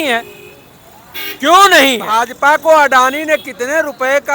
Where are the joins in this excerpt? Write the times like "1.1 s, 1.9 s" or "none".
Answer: 2.2 s